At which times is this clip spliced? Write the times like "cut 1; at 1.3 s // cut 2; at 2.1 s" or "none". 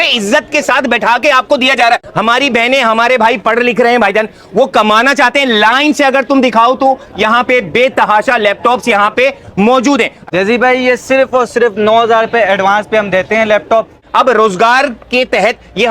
cut 1; at 10.2 s // cut 2; at 14.0 s